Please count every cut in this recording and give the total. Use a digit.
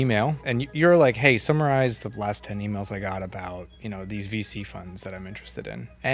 0